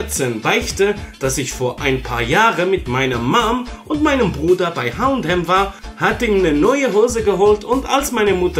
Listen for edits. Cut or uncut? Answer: cut